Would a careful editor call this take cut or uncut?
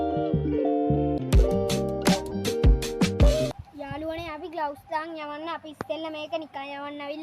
cut